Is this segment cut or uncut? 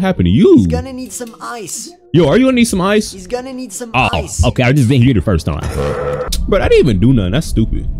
cut